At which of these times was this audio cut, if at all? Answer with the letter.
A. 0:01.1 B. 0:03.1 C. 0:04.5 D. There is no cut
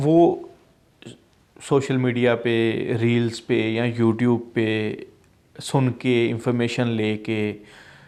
D